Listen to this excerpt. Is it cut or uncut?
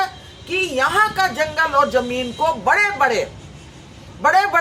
uncut